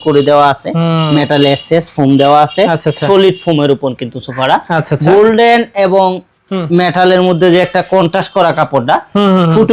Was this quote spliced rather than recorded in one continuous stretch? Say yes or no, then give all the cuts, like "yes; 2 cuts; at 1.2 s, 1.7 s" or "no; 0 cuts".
no; 0 cuts